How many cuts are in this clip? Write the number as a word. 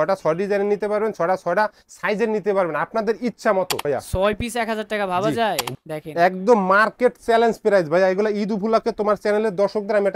two